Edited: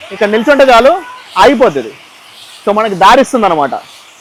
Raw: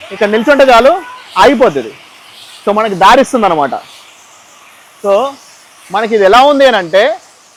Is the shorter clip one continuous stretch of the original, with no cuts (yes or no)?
yes